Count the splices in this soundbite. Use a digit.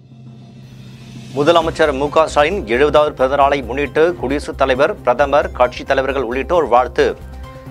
1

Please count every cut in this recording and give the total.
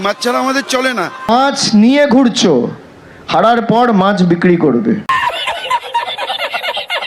2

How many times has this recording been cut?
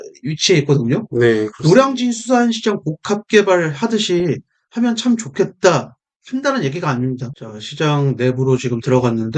1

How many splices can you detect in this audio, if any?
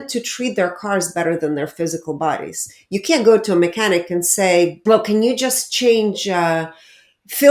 1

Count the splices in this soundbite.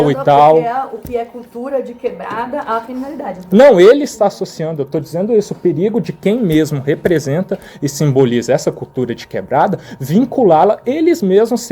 0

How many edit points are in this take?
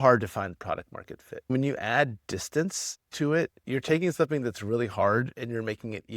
2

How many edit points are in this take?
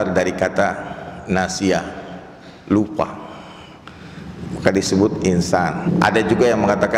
1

